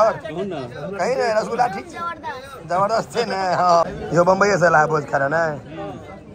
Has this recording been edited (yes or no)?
yes